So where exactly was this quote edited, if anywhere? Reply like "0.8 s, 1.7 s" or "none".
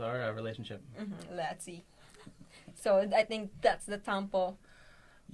none